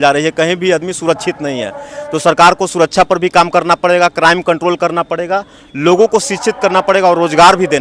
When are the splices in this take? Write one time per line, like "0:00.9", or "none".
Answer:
none